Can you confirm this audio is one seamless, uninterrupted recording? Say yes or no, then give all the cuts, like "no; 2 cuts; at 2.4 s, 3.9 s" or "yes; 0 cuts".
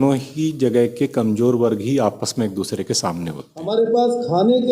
no; 1 cut; at 3.5 s